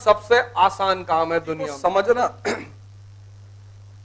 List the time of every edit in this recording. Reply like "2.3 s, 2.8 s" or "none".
1.7 s